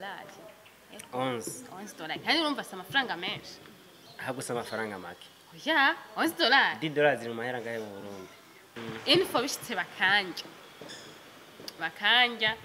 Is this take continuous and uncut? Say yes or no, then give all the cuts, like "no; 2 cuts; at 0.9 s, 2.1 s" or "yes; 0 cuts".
no; 1 cut; at 8.7 s